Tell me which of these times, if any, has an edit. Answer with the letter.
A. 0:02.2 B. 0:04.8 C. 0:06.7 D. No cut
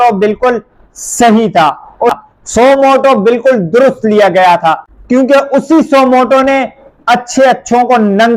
A